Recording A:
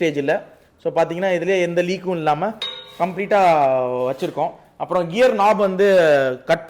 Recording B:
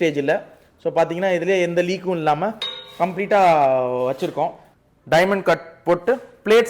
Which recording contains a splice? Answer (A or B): B